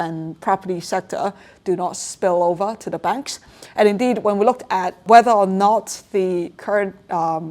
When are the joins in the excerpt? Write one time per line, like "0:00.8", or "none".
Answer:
0:05.0